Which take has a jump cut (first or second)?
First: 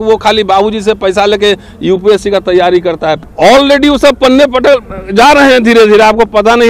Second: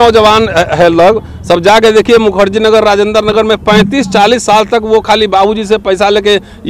first